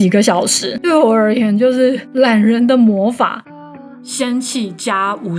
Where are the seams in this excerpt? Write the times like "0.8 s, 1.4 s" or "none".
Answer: 3.4 s